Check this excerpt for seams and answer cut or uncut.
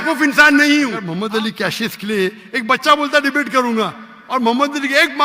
cut